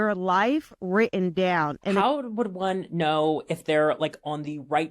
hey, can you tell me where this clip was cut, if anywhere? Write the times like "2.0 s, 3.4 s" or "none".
2.0 s